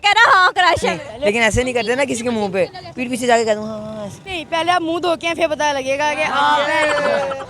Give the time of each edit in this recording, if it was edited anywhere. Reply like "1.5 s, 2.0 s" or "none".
1.1 s, 4.3 s